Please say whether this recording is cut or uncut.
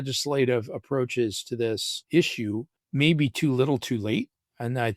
cut